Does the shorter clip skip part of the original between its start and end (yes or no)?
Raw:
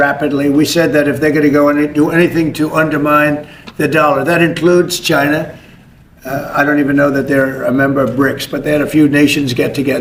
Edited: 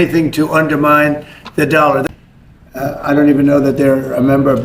yes